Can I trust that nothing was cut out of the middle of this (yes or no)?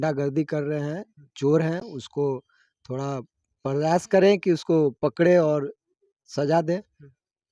yes